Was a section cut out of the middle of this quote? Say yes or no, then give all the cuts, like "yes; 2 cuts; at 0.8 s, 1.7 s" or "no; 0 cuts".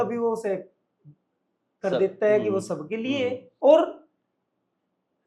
yes; 1 cut; at 3.5 s